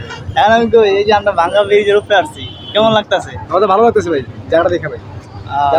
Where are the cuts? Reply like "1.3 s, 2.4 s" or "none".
none